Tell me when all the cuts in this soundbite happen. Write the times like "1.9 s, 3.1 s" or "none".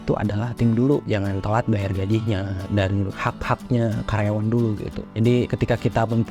1.0 s, 3.0 s, 5.2 s